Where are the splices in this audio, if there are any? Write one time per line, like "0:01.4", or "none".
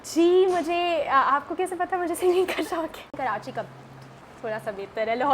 0:03.2